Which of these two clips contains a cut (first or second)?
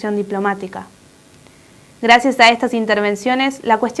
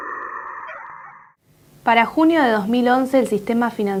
first